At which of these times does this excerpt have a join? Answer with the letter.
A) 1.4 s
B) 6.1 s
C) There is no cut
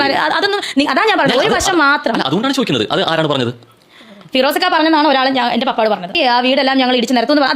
B